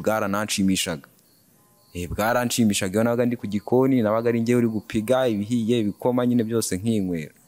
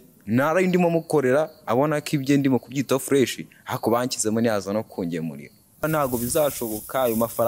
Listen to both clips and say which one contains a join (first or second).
second